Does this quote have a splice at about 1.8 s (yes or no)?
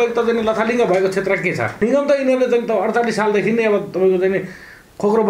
yes